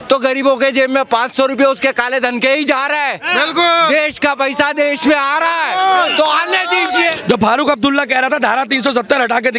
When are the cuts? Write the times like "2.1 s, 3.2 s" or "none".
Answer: 7.2 s